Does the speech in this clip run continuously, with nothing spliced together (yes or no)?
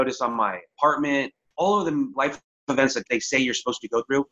no